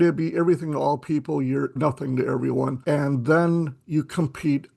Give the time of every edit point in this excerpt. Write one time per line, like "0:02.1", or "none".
0:01.8
0:02.8